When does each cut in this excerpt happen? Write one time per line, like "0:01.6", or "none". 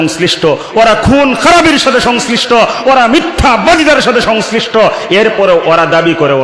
none